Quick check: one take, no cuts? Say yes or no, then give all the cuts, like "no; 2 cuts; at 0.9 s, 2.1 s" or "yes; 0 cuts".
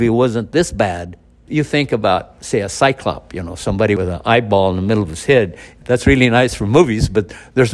no; 2 cuts; at 1.5 s, 4.0 s